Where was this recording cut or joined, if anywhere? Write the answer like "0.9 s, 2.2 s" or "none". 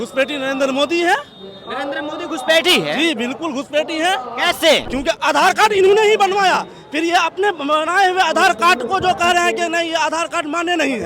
4.9 s